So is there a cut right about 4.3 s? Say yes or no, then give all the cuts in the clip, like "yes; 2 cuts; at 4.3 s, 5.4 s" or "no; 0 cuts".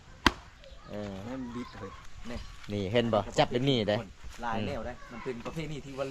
no; 1 cut; at 2.0 s